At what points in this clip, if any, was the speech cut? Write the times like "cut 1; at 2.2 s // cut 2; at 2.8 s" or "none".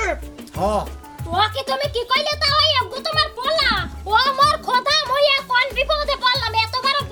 none